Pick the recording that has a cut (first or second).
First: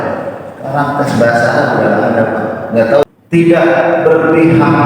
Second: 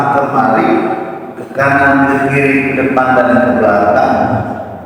first